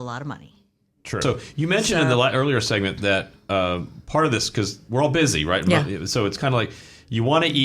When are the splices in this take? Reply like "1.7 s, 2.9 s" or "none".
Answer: 1.2 s